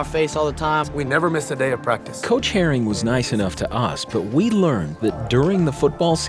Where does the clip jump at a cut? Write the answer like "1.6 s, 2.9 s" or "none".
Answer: 0.9 s